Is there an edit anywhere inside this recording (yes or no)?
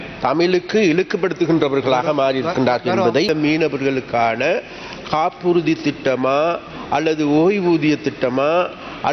yes